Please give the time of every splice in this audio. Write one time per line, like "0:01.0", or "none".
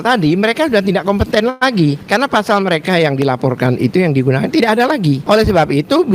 0:02.0
0:05.2

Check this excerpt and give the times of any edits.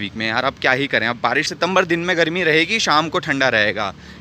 0:01.5

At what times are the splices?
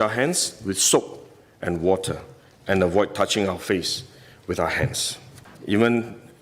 0:05.5

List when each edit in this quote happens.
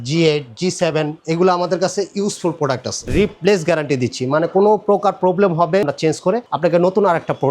0:03.1
0:05.8

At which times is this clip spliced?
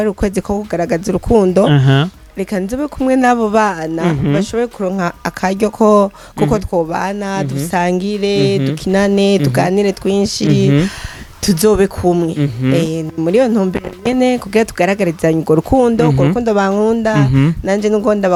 none

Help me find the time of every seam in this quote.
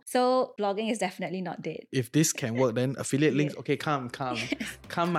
0:01.8

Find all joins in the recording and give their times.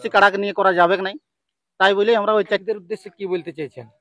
0:02.5

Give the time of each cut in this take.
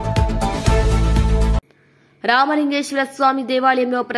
0:01.5

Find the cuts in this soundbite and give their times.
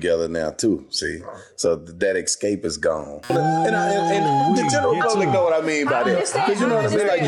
0:03.3

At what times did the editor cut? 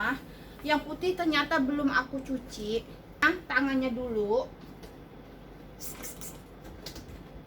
0:03.2

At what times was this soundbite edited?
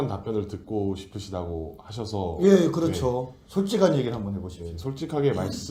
none

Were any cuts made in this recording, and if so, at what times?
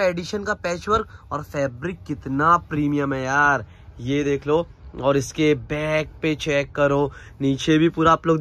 none

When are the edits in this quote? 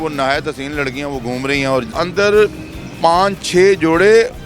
0:01.9

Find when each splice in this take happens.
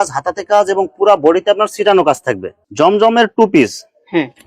0:02.6

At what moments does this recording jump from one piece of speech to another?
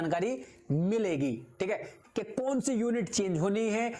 0:02.0

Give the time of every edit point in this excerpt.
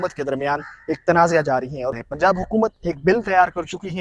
0:01.9

